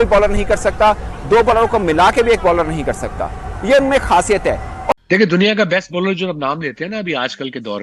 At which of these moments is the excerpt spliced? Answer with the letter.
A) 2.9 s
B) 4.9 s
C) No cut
B